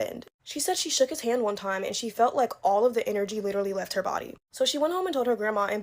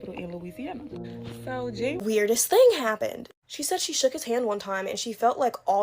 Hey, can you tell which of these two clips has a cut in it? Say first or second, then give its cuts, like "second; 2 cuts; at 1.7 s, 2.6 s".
second; 1 cut; at 2.0 s